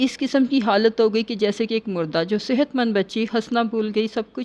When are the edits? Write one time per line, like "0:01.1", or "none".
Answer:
none